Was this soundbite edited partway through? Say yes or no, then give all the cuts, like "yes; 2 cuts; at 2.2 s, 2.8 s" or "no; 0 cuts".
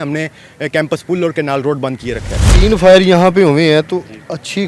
yes; 1 cut; at 2.4 s